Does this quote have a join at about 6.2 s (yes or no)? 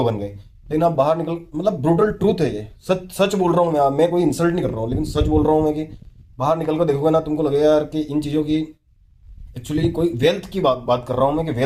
no